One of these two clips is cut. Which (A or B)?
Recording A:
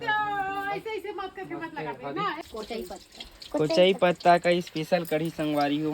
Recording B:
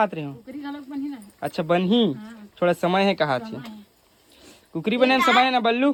A